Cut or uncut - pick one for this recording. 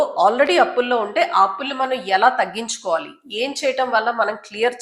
uncut